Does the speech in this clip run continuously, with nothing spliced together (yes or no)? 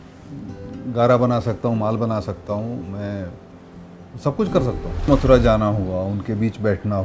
no